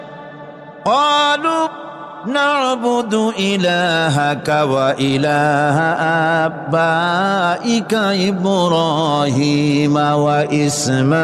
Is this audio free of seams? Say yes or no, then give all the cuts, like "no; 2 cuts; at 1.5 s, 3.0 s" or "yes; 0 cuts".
yes; 0 cuts